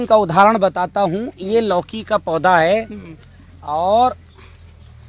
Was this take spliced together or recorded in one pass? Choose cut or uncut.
uncut